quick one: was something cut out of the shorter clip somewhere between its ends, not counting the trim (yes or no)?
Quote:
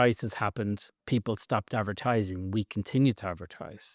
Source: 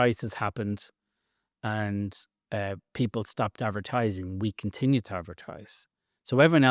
yes